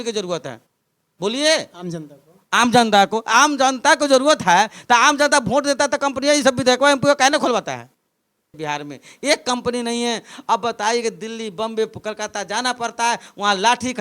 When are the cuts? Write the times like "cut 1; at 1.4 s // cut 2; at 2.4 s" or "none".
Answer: cut 1; at 8.4 s